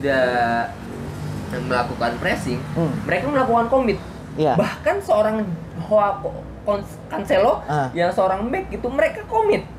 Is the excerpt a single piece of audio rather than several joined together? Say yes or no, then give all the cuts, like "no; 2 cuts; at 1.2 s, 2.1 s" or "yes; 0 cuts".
yes; 0 cuts